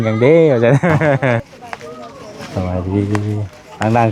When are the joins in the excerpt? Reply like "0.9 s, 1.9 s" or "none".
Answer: 1.5 s